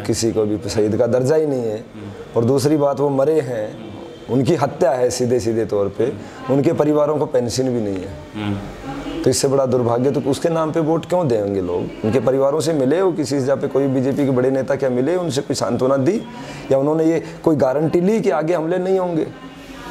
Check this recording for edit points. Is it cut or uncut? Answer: uncut